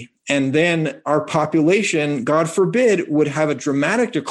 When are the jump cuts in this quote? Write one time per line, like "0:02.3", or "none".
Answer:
none